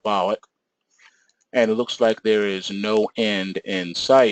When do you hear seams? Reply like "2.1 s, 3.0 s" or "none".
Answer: 3.1 s